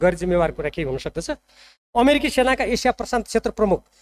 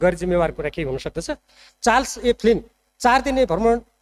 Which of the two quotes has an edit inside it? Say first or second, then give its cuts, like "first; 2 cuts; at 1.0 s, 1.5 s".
second; 1 cut; at 1.7 s